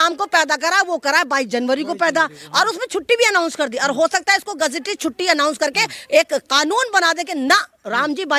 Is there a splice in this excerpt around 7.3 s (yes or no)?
no